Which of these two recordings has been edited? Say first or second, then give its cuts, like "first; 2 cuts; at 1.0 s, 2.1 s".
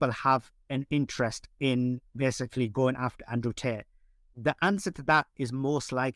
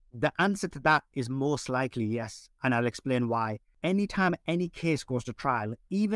second; 1 cut; at 3.6 s